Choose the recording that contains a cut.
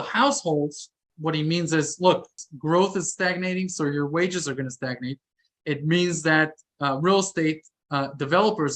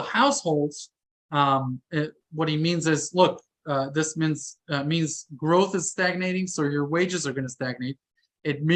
first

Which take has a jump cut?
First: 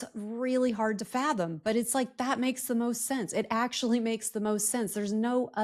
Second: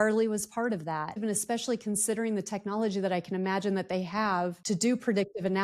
second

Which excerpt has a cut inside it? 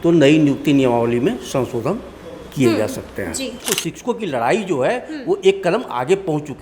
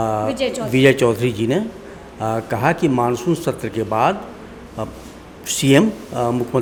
first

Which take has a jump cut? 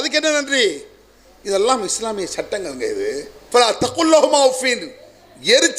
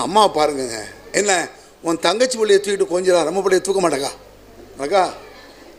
first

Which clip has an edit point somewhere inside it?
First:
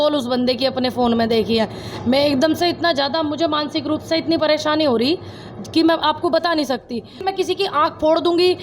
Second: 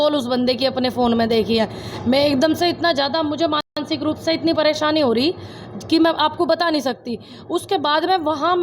first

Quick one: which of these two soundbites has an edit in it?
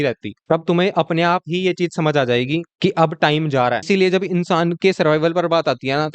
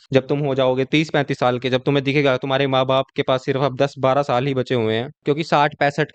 first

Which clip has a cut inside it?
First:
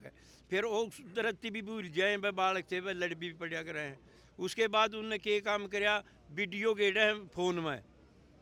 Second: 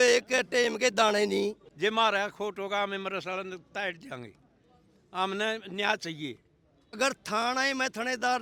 second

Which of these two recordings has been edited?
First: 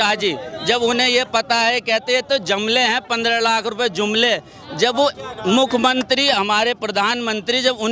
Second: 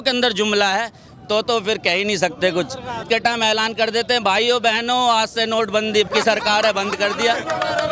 second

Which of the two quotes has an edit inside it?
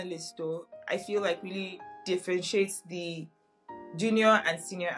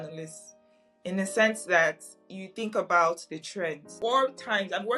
second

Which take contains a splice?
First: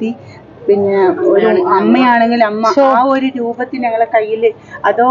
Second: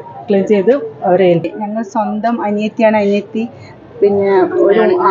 second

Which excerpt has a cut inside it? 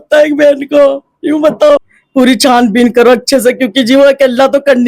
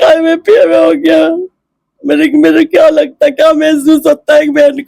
first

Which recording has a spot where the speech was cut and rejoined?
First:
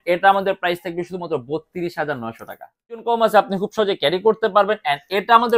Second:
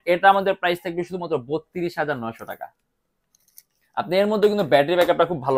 first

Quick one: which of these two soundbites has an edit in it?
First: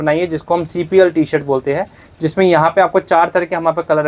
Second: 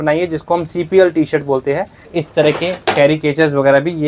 second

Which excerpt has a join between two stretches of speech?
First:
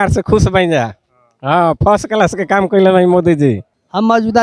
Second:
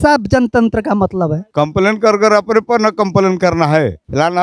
second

